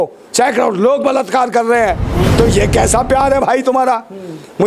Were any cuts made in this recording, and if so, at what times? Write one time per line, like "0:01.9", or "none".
0:02.2